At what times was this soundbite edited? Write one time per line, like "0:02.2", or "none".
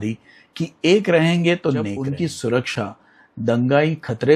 0:02.0